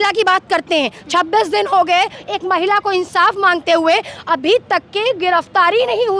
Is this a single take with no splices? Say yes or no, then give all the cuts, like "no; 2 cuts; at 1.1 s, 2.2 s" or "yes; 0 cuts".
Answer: yes; 0 cuts